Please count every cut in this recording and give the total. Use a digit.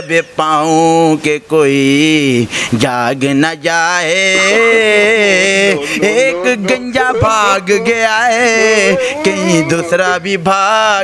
0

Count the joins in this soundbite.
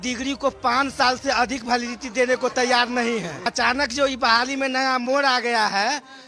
1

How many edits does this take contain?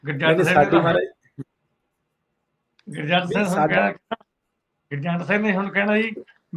0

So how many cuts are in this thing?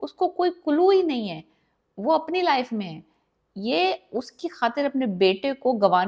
0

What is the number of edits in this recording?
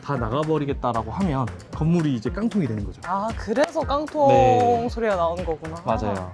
0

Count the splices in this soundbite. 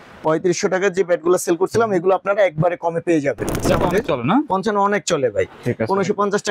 1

